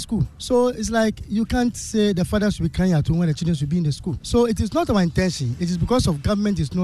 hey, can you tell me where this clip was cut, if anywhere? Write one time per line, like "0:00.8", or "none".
0:04.1